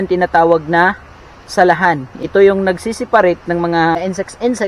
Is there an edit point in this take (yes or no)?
yes